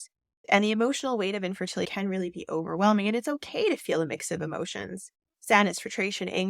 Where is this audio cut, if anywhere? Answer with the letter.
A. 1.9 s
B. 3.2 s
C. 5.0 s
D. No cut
A